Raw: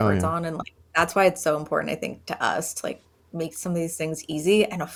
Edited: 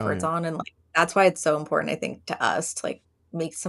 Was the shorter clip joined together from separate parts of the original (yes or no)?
no